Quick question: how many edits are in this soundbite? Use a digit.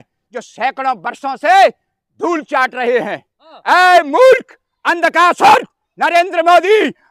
1